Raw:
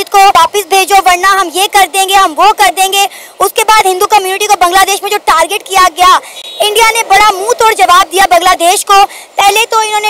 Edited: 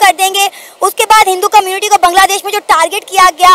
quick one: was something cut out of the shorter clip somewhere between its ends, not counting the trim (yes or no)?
no